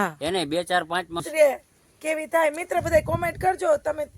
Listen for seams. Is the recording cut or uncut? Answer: cut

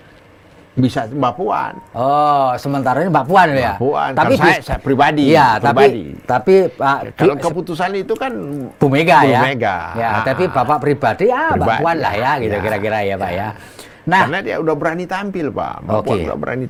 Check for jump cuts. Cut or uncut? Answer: uncut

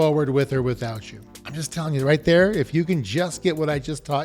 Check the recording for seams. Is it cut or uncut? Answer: uncut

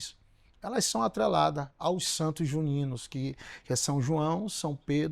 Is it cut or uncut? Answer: uncut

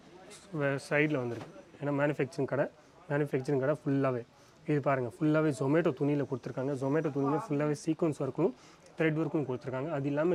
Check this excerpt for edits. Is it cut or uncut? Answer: uncut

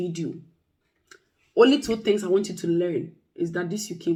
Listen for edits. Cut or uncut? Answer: uncut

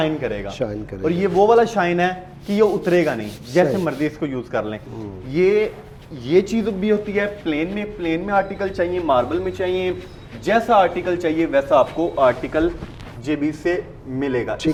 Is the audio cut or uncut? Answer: uncut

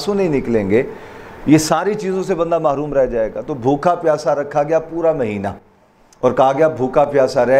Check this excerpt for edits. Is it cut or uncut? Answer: uncut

